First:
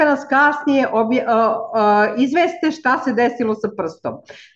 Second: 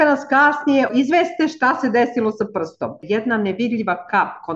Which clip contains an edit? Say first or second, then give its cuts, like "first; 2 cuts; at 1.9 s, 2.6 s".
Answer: second; 2 cuts; at 0.9 s, 3.0 s